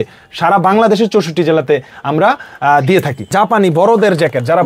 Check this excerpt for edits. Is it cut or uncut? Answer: cut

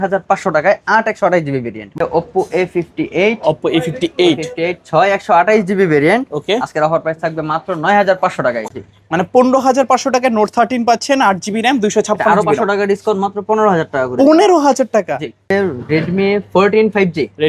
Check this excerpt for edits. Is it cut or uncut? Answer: cut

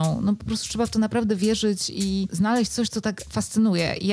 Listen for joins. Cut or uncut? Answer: uncut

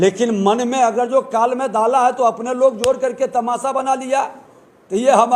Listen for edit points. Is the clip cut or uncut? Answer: uncut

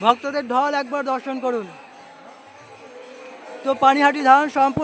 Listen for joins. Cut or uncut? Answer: uncut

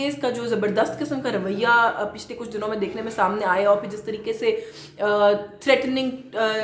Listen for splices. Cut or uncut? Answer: uncut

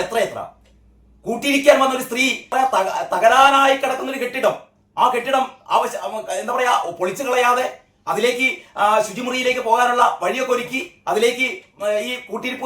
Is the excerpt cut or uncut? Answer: cut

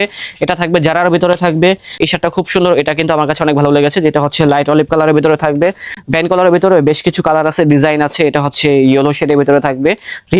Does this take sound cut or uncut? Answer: uncut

